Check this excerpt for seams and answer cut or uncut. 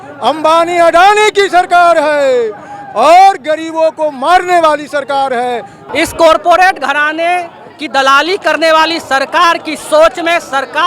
cut